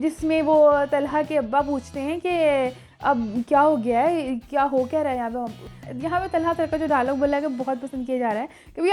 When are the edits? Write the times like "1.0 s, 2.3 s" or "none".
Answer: 5.7 s